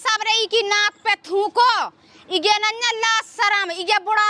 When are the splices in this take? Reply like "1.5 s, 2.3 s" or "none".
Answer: none